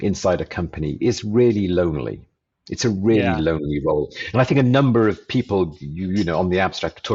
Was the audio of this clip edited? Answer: no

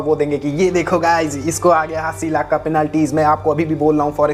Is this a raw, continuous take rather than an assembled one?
yes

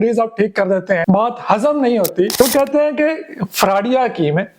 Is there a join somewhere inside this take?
yes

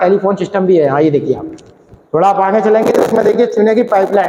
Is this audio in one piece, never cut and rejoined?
yes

